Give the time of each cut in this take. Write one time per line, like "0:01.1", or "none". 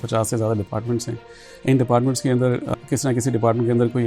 0:02.7